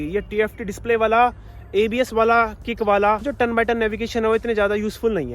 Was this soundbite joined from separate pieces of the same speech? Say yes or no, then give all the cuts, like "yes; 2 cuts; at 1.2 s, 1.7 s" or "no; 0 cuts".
yes; 1 cut; at 3.3 s